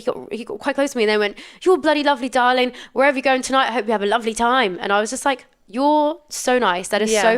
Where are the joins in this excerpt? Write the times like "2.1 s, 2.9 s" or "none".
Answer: none